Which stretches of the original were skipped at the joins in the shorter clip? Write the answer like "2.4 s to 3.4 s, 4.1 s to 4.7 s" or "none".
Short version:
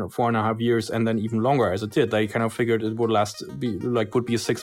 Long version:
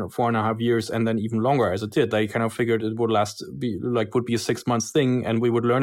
none